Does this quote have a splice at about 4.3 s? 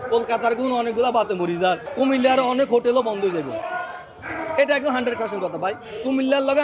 no; 1 cut; at 1.9 s

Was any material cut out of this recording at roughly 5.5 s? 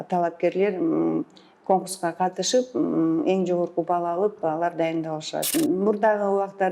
yes; 1 cut; at 5.5 s

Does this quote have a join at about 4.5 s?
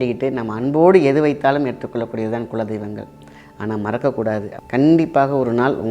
yes; 1 cut; at 4.5 s

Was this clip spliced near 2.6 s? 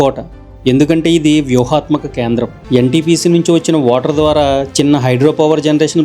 yes; 1 cut; at 2.6 s

